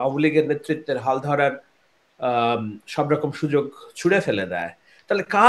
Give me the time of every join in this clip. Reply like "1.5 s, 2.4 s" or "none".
none